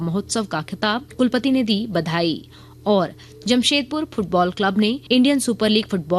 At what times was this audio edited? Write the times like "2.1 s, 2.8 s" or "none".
1.1 s, 5.0 s

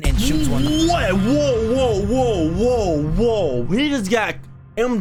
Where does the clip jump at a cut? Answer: none

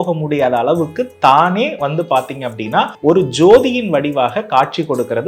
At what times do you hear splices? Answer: 2.9 s

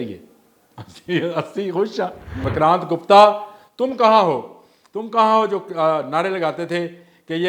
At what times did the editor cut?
2.5 s

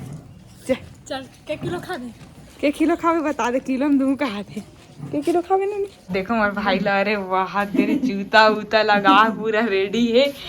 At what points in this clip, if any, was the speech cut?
6.0 s

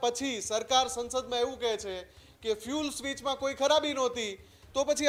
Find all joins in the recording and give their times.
none

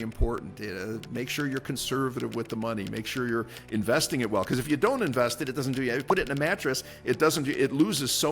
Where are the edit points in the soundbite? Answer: none

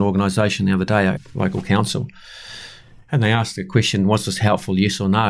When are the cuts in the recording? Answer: 1.2 s

